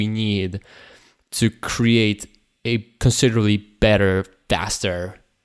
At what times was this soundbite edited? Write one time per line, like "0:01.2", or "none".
0:02.9
0:04.4